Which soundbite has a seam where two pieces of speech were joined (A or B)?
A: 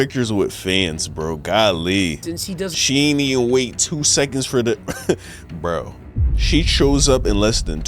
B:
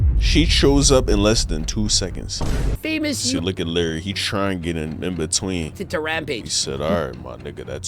B